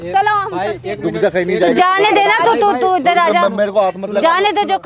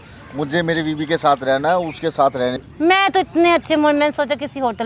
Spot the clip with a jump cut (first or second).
second